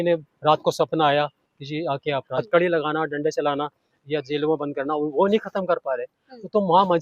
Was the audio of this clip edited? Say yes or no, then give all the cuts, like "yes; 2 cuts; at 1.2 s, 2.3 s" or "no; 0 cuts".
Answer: yes; 1 cut; at 2.3 s